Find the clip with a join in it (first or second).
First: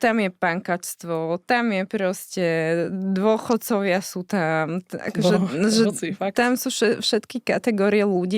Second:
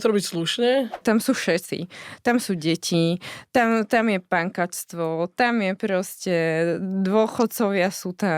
second